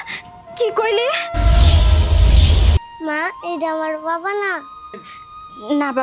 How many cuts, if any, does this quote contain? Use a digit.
1